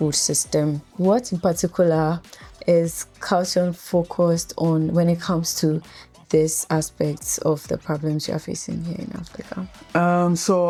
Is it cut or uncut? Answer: uncut